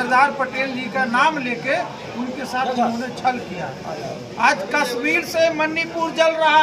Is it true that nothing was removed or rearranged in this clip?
yes; 0 cuts

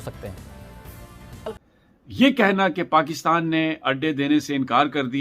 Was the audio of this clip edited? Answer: yes; 1 cut; at 1.6 s

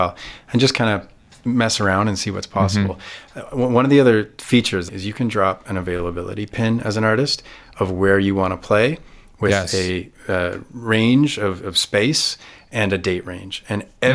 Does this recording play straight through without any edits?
no; 1 cut; at 4.9 s

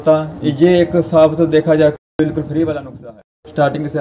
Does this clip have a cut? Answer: yes; 2 cuts; at 1.9 s, 3.1 s

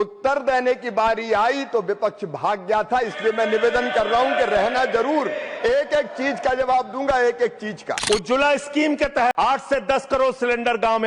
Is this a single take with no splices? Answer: no; 2 cuts; at 7.9 s, 9.3 s

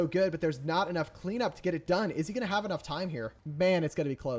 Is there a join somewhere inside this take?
yes; 1 cut; at 3.4 s

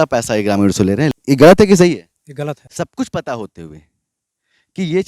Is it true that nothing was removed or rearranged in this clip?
no; 2 cuts; at 1.1 s, 2.7 s

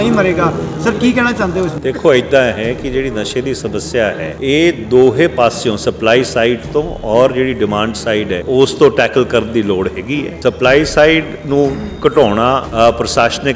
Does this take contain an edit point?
yes; 4 cuts; at 4.3 s, 8.4 s, 10.3 s, 12.7 s

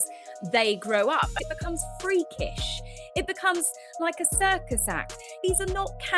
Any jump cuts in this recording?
yes; 2 cuts; at 1.3 s, 5.4 s

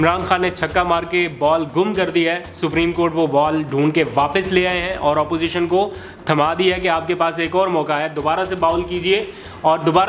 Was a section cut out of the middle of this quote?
no; 0 cuts

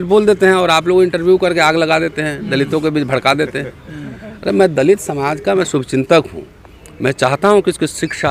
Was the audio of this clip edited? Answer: no; 0 cuts

